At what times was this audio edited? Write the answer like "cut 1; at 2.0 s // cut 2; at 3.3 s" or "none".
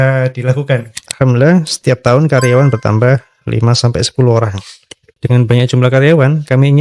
cut 1; at 1.0 s